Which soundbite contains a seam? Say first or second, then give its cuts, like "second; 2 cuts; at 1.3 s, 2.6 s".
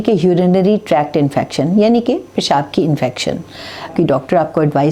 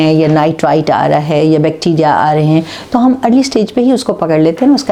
first; 1 cut; at 3.9 s